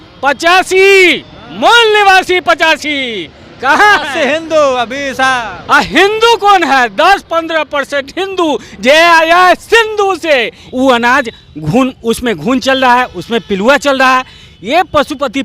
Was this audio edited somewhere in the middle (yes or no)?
yes